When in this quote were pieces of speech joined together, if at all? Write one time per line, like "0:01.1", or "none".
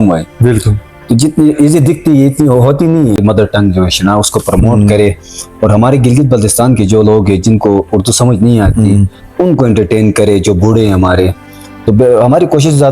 0:03.2